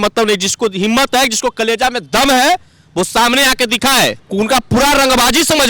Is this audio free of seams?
no; 1 cut; at 4.2 s

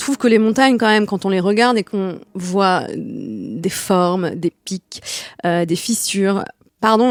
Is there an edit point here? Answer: no; 0 cuts

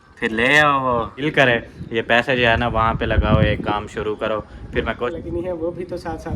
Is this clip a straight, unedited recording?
no; 2 cuts; at 1.2 s, 5.1 s

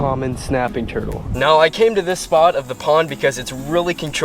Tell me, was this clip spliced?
yes; 1 cut; at 1.2 s

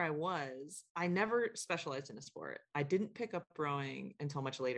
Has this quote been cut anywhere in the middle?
no; 0 cuts

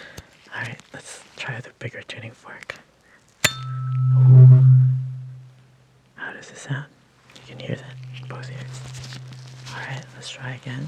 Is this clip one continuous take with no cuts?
yes; 0 cuts

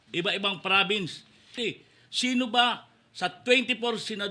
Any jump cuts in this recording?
yes; 1 cut; at 1.5 s

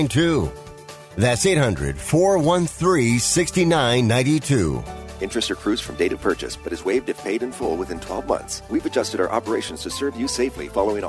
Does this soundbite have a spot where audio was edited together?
yes; 1 cut; at 8.6 s

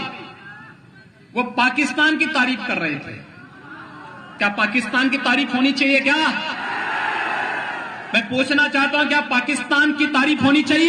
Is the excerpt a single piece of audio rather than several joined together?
yes; 0 cuts

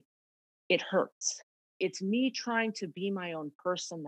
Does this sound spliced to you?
yes; 1 cut; at 1.6 s

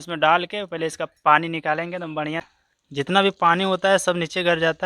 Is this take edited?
yes; 1 cut; at 2.5 s

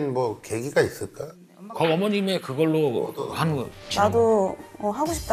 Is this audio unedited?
no; 1 cut; at 3.8 s

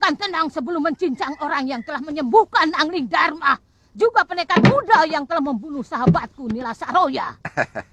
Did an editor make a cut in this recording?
no; 0 cuts

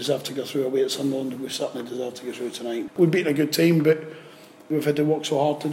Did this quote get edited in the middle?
yes; 2 cuts; at 2.9 s, 4.7 s

